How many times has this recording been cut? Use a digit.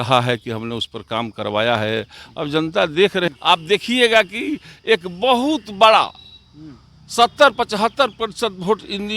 1